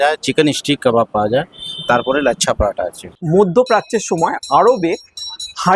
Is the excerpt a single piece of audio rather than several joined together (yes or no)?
no